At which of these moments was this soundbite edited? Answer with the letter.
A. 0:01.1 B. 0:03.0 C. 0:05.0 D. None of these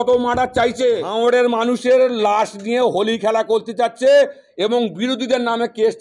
A